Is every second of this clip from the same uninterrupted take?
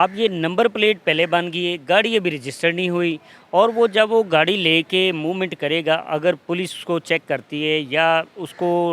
yes; 0 cuts

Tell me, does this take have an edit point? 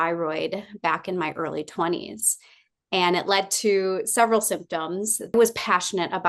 yes; 1 cut; at 5.3 s

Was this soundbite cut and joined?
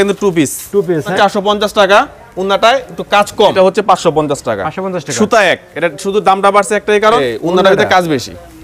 yes; 3 cuts; at 1.1 s, 3.5 s, 7.2 s

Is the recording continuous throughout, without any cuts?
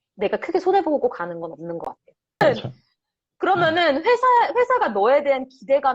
no; 1 cut; at 2.4 s

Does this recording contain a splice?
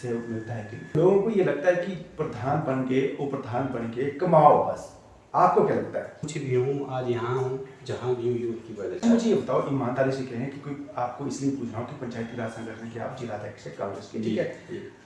yes; 3 cuts; at 0.9 s, 6.2 s, 9.0 s

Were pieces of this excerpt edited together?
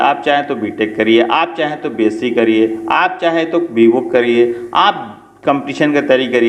no; 0 cuts

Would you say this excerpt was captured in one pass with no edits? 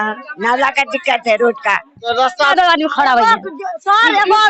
no; 1 cut; at 2.5 s

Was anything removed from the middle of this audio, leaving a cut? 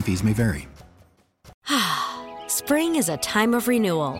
yes; 1 cut; at 1.5 s

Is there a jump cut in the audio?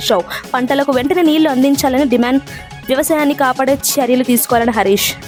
no; 0 cuts

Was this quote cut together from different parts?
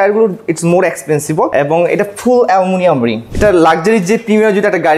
yes; 2 cuts; at 1.5 s, 3.3 s

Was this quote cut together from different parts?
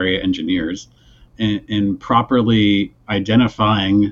no; 0 cuts

